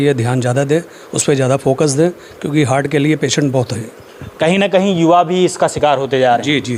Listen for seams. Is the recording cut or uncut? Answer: uncut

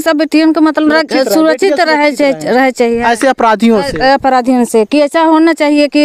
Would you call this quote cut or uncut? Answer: uncut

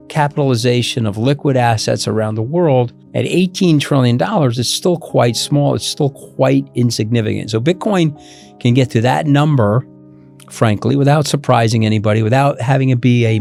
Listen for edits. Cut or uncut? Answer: uncut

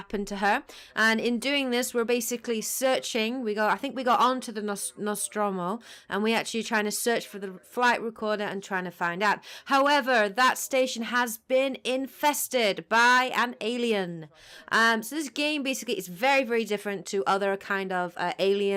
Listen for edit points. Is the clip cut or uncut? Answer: uncut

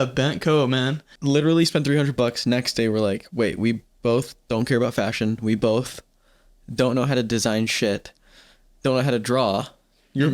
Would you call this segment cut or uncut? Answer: cut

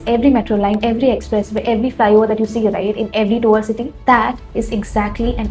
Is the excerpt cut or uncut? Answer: cut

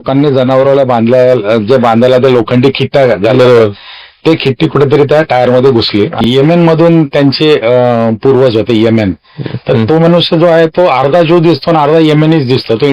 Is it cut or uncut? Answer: cut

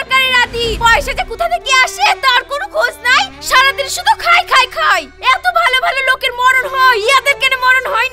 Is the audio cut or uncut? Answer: uncut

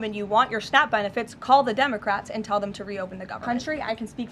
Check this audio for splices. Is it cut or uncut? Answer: cut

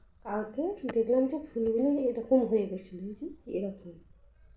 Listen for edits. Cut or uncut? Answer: uncut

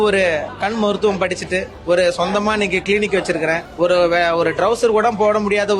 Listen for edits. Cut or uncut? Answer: cut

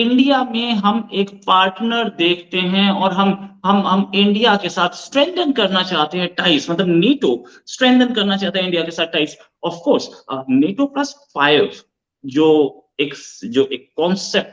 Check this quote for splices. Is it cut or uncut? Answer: uncut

